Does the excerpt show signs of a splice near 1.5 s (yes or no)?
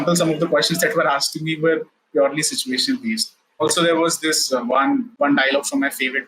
no